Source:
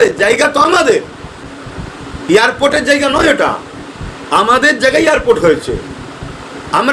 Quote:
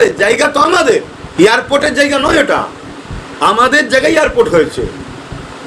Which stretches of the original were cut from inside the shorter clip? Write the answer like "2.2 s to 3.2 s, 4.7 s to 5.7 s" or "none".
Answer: 1.2 s to 2.1 s